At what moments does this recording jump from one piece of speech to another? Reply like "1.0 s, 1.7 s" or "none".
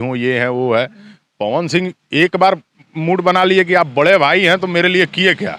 none